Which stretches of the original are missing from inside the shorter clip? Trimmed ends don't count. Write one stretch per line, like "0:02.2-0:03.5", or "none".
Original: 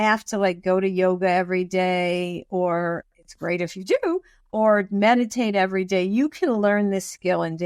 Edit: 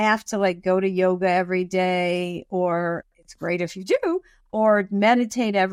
none